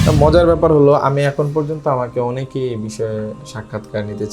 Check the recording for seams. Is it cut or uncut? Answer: uncut